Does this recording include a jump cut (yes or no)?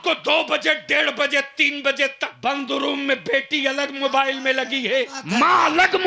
yes